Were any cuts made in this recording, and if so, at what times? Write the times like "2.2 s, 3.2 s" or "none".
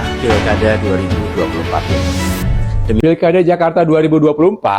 3.0 s